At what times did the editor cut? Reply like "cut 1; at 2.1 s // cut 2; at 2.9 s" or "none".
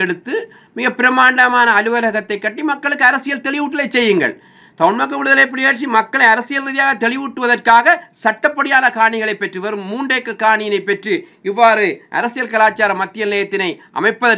none